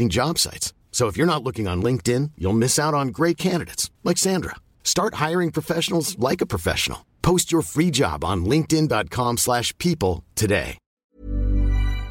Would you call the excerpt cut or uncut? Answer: cut